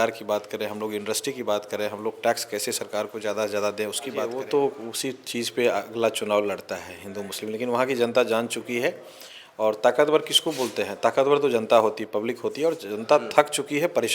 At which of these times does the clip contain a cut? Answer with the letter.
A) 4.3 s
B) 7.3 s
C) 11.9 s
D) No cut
A